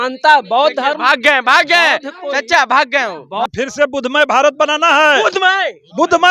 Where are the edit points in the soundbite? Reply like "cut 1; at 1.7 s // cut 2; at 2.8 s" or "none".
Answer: cut 1; at 3.5 s